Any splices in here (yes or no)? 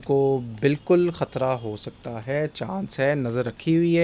no